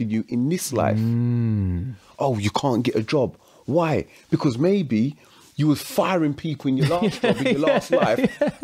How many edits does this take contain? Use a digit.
0